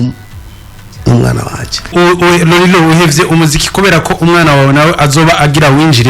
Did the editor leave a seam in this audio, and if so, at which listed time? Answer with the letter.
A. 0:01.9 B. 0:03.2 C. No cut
A